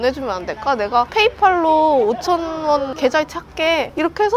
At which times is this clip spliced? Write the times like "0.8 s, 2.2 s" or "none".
1.1 s